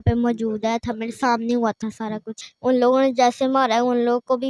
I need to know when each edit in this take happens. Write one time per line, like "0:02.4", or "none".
0:02.4